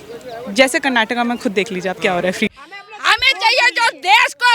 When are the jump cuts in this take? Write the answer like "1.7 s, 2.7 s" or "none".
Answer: 2.6 s